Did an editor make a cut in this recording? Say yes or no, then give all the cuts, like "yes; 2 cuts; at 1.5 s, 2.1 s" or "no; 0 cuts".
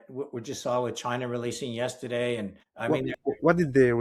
yes; 1 cut; at 2.9 s